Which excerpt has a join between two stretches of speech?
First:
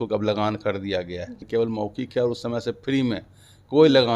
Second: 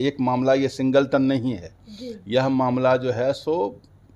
first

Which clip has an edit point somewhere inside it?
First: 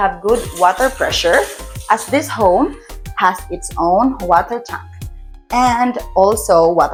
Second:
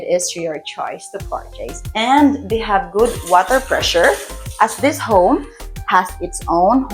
second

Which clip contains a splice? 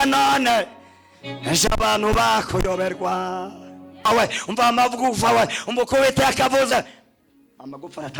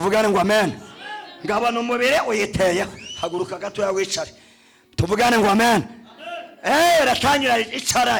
first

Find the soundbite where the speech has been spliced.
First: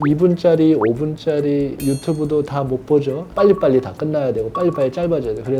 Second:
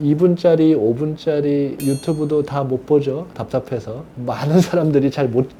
first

